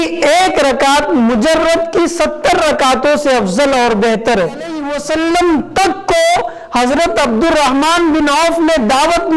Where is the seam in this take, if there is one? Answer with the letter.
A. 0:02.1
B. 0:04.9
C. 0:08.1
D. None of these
B